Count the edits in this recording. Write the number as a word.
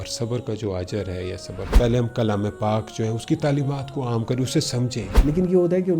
two